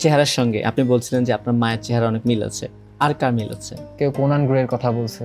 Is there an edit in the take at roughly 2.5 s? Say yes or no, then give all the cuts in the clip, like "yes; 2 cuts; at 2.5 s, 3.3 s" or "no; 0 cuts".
no; 1 cut; at 3.8 s